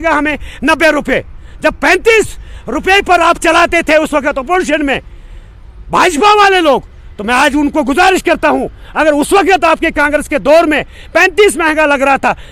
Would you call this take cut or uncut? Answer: uncut